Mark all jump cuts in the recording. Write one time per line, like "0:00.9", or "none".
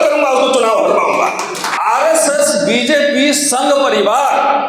0:01.6